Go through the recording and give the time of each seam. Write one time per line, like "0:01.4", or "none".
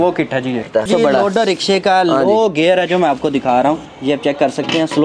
0:00.8
0:03.9